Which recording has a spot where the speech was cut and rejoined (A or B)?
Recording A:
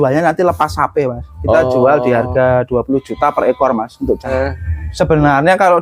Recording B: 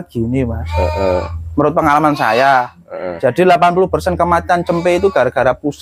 A